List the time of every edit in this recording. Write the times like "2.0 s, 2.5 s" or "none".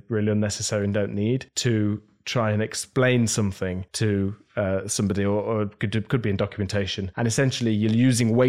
1.5 s, 3.9 s, 7.0 s